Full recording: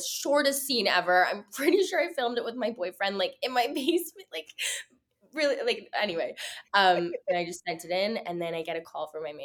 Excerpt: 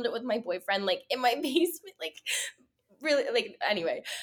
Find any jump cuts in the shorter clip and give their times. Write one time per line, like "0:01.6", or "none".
none